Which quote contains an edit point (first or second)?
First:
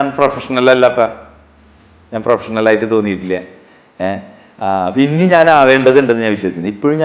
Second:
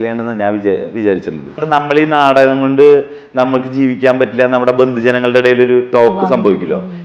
second